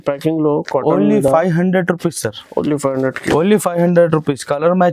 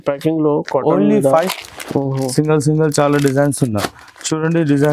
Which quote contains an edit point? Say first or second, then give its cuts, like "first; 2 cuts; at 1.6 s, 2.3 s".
second; 1 cut; at 1.3 s